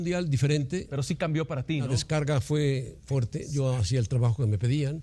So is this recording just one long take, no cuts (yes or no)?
yes